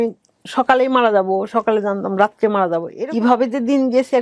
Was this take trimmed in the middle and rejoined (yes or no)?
yes